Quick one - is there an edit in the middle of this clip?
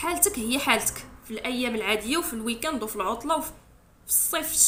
no; 0 cuts

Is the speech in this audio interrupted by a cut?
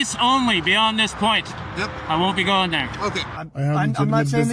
yes; 1 cut; at 3.3 s

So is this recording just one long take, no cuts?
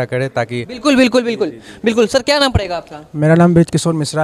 yes; 0 cuts

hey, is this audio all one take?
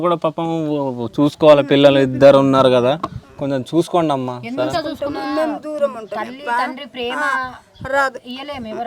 yes; 0 cuts

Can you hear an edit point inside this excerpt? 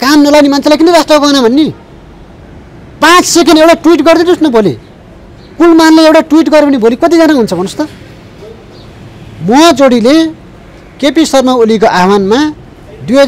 no; 0 cuts

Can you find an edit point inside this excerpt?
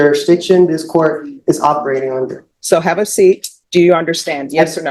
yes; 2 cuts; at 2.5 s, 3.5 s

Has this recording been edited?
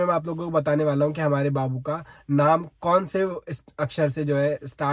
no; 0 cuts

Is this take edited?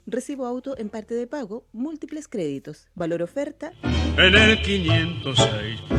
no; 0 cuts

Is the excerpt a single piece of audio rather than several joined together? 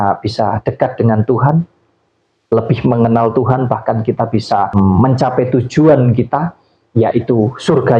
yes; 0 cuts

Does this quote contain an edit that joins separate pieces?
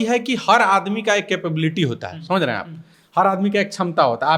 no; 0 cuts

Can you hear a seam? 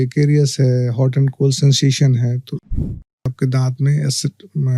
yes; 1 cut; at 3.0 s

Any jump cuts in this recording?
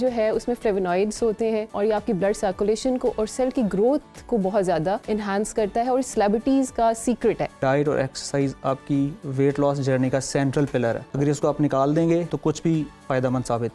yes; 5 cuts; at 1.7 s, 5.0 s, 7.6 s, 11.1 s, 12.3 s

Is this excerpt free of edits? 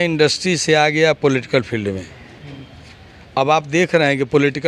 yes; 0 cuts

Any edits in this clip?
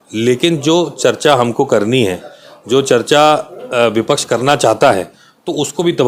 no; 0 cuts

